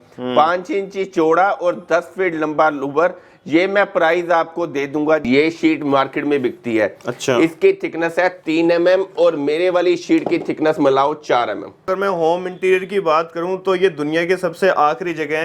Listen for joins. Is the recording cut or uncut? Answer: cut